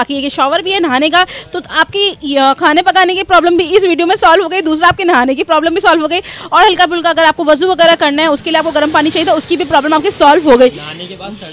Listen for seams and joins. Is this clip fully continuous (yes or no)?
yes